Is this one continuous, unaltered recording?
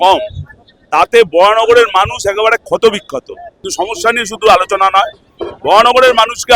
no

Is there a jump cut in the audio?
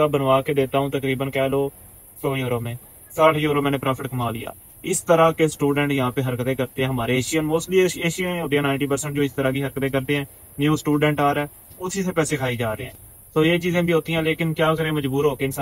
no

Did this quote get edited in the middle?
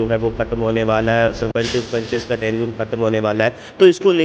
no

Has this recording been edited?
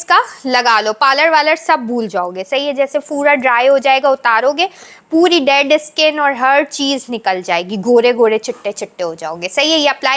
no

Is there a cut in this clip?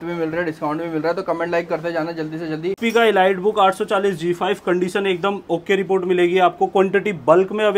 yes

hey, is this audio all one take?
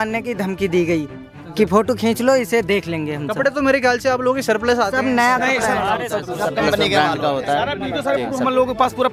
yes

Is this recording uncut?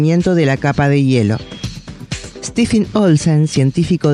yes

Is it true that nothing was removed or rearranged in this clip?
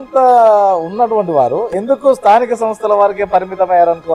yes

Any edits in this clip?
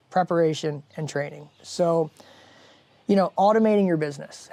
no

